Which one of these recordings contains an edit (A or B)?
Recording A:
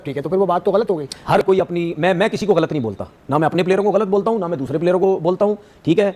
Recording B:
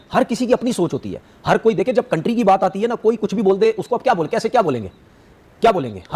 A